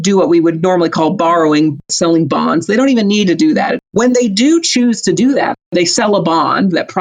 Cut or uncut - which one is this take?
cut